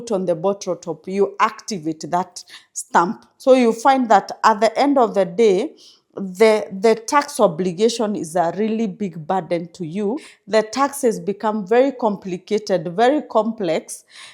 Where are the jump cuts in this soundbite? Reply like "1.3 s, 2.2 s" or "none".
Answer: 3.3 s, 10.3 s